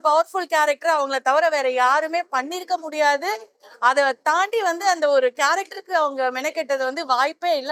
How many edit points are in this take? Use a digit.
0